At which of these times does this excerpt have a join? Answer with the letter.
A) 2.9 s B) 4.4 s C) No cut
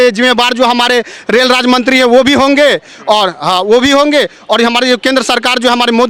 C